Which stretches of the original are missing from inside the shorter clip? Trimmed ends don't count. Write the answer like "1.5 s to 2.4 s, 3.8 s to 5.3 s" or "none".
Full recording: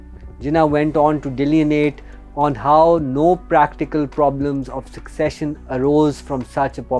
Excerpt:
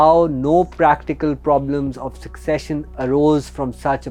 none